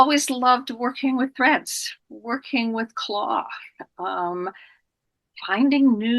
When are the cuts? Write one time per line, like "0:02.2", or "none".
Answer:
none